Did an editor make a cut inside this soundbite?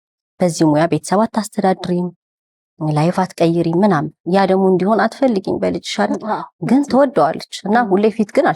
no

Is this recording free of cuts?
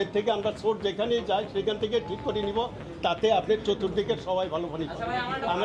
yes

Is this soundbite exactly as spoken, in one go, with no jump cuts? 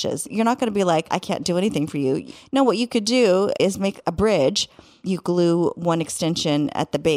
no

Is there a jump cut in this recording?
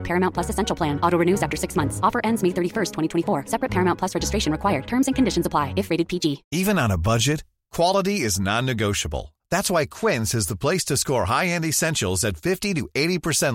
yes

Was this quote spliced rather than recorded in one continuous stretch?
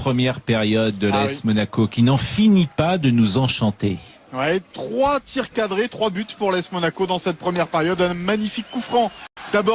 no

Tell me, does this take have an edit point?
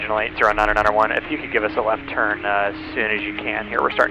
no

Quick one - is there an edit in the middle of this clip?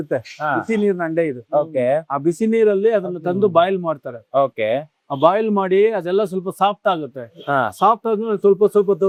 no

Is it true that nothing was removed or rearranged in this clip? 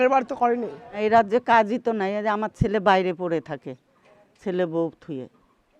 no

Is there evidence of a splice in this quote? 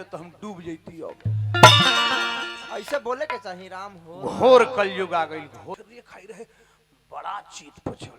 yes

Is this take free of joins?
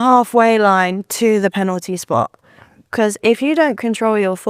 yes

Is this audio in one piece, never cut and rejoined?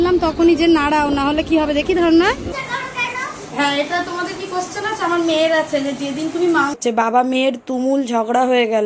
no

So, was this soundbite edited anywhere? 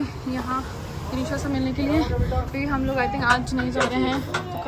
no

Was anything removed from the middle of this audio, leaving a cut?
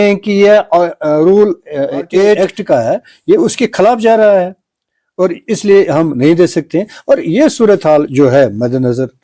yes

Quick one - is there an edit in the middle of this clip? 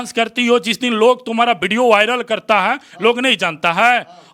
no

